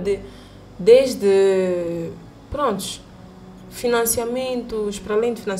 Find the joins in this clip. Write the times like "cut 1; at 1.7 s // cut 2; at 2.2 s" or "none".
none